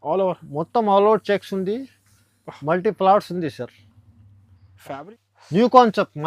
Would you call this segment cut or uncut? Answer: cut